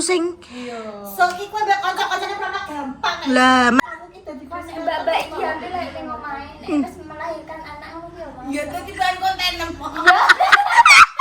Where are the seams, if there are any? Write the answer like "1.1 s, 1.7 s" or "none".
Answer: 3.8 s